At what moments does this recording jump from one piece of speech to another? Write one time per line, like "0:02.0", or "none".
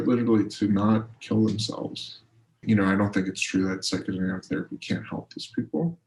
0:02.6